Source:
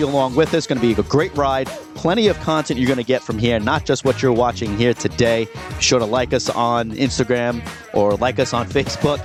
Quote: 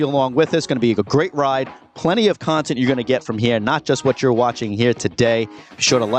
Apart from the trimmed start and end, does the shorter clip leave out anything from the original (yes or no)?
no